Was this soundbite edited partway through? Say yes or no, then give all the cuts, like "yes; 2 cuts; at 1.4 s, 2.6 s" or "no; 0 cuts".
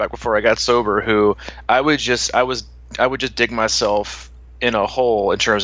no; 0 cuts